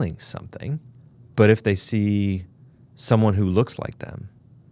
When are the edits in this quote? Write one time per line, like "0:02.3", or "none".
none